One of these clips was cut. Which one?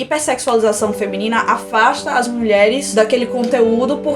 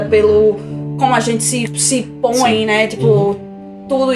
first; 1 cut; at 2.8 s

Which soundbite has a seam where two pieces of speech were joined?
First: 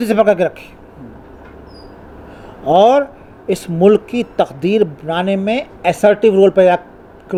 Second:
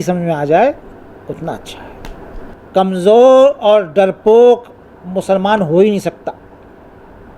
second; 1 cut; at 2.5 s

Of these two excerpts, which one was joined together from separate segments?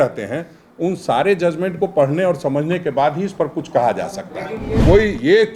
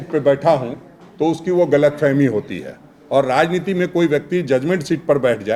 first; 1 cut; at 4.6 s

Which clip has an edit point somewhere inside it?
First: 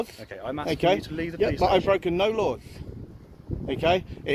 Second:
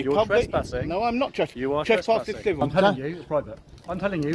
second; 1 cut; at 2.6 s

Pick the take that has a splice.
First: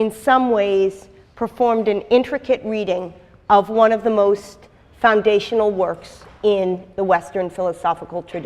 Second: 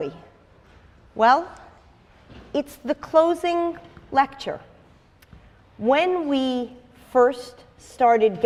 first; 1 cut; at 7.3 s

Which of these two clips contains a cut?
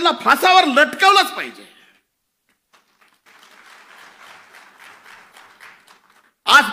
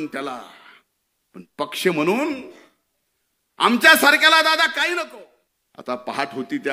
second; 1 cut; at 5.1 s

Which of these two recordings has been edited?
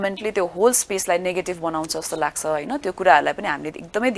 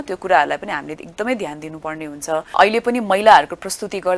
second; 1 cut; at 2.6 s

